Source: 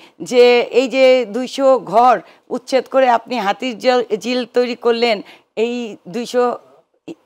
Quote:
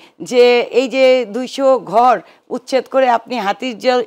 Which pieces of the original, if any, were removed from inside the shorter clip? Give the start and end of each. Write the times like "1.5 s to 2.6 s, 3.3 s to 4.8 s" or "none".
none